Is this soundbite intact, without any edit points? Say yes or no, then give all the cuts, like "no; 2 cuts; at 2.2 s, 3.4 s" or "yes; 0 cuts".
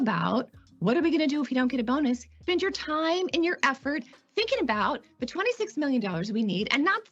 no; 1 cut; at 2.3 s